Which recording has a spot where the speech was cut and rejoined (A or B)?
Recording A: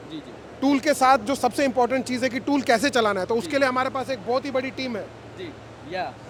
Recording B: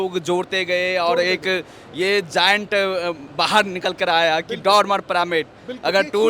B